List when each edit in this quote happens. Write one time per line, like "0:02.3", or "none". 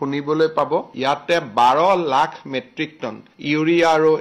none